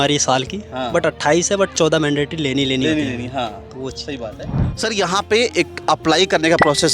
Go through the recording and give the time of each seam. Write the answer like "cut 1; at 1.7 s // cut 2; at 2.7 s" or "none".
cut 1; at 4.6 s